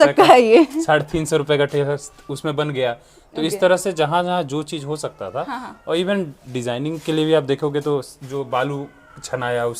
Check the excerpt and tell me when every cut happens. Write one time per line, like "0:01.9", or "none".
none